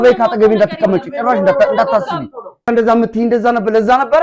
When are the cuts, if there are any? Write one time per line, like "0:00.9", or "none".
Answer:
0:02.6